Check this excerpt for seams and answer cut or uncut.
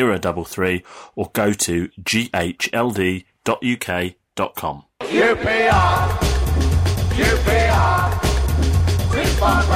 cut